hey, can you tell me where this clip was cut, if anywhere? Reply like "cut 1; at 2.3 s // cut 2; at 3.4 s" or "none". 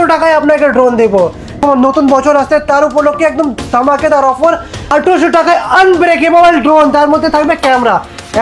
cut 1; at 1.6 s // cut 2; at 4.9 s